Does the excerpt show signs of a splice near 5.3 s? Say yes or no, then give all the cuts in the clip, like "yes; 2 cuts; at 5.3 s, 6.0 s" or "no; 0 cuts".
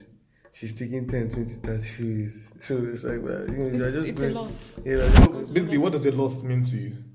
yes; 1 cut; at 5.3 s